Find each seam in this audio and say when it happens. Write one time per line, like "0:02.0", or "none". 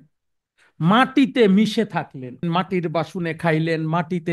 0:02.4